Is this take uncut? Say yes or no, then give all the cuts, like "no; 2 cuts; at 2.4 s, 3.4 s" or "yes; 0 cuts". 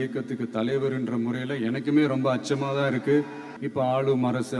no; 1 cut; at 3.5 s